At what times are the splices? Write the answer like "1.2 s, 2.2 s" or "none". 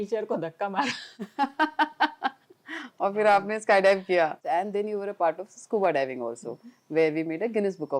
4.4 s